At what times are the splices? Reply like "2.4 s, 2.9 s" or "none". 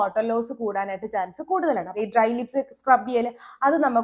1.9 s